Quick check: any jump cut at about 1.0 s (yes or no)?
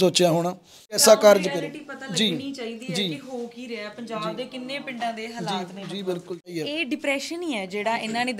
yes